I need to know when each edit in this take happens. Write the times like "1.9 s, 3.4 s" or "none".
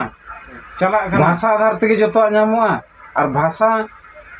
1.1 s